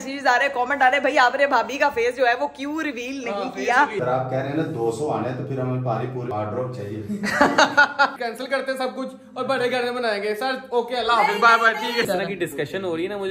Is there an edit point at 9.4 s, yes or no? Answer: no